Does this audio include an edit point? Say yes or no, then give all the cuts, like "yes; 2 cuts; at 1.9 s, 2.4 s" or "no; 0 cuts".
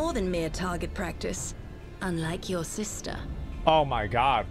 no; 0 cuts